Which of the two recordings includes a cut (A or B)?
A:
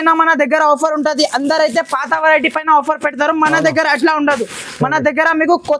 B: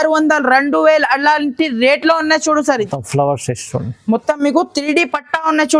B